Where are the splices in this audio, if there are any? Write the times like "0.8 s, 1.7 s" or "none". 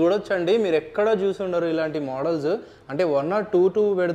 none

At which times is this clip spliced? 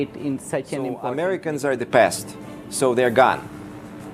1.0 s

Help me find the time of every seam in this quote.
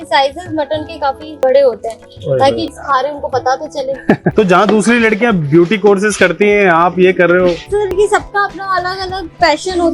1.4 s, 2.7 s, 4.0 s

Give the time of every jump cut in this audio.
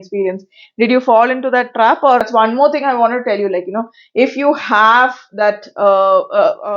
2.2 s

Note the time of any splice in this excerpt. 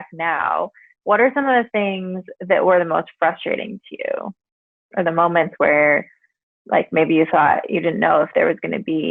none

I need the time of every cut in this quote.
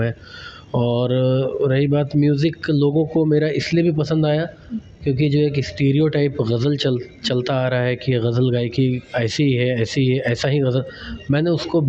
none

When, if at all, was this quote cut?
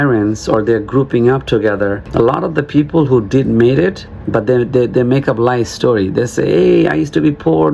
2.1 s

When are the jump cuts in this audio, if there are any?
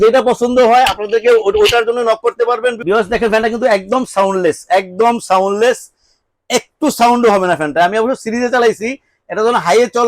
2.8 s

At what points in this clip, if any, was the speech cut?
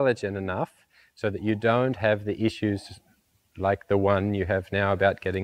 none

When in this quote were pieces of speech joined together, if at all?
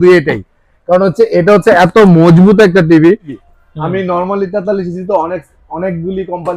3.4 s

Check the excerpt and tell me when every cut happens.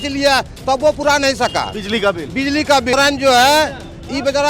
2.9 s

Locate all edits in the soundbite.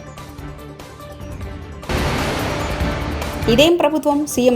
1.8 s

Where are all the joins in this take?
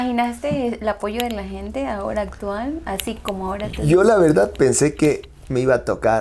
none

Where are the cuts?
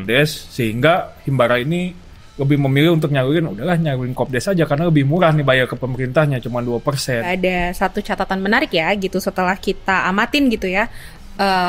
7.3 s

